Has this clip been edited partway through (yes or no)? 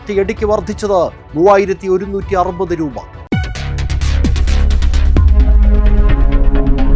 no